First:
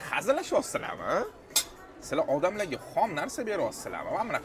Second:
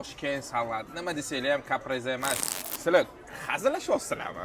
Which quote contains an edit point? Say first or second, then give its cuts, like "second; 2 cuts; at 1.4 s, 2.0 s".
second; 1 cut; at 2.4 s